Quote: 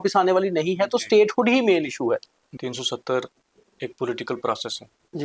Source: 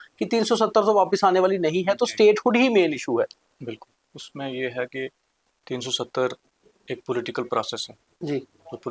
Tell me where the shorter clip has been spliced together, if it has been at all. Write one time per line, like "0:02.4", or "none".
0:02.4